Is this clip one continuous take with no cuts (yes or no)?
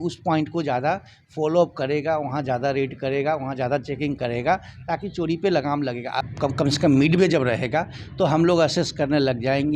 no